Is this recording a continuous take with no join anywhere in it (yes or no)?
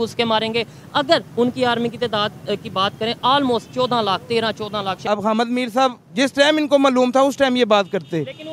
no